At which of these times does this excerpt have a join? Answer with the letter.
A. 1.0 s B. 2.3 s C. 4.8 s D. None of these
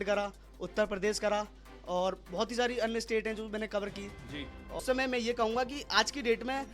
C